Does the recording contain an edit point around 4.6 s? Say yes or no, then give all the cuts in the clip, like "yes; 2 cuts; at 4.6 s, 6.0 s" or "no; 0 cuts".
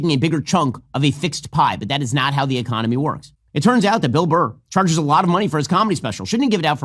no; 1 cut; at 3.3 s